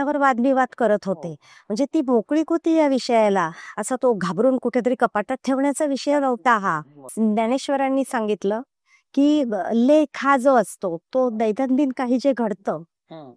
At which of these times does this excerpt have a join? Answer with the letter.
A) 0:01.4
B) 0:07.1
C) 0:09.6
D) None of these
B